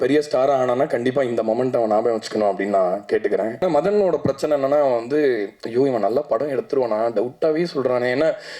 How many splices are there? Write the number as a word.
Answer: one